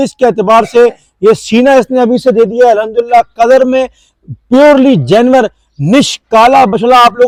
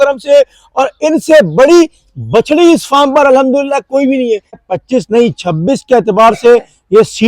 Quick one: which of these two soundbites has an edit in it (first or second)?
second